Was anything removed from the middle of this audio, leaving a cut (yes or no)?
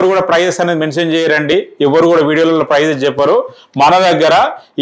no